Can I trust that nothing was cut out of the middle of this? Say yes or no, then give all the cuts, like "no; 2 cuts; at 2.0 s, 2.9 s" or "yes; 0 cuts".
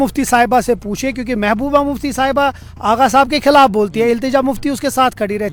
yes; 0 cuts